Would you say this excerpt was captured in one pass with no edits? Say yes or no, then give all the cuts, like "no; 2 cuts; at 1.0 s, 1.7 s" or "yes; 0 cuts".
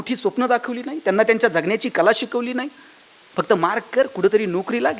yes; 0 cuts